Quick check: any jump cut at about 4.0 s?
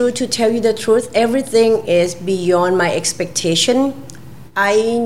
no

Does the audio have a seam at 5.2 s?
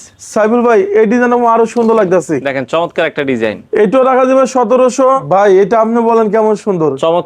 yes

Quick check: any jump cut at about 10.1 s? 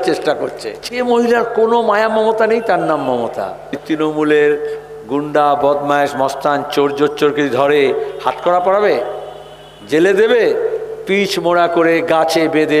no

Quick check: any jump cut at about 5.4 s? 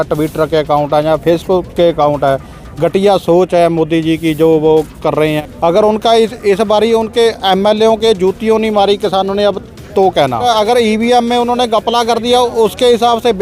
yes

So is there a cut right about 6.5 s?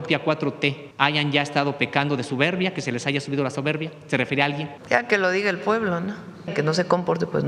yes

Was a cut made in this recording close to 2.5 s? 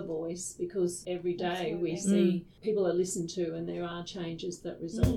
yes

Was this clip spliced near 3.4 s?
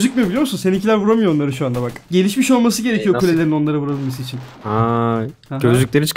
no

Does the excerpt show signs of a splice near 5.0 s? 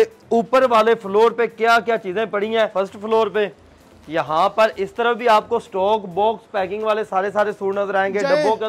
no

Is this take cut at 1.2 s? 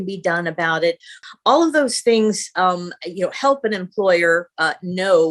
yes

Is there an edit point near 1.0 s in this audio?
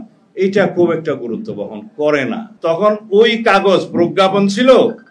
no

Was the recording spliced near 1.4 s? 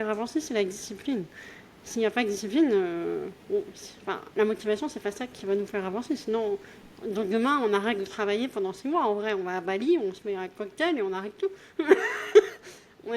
no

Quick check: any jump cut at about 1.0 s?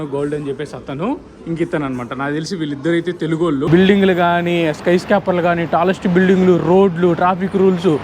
no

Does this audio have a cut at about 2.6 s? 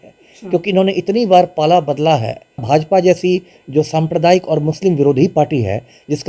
yes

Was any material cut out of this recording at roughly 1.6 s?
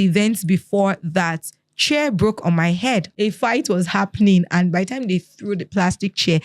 no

